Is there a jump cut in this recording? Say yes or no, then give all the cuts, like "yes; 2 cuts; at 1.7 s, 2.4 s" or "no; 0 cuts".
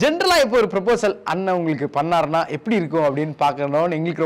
no; 0 cuts